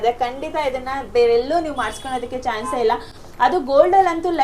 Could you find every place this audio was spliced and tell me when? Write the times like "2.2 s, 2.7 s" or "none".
none